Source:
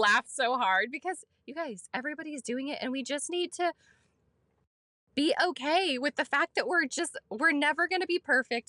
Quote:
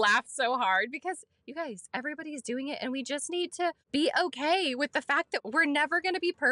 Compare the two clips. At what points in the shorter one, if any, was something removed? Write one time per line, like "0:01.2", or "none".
0:03.8
0:05.3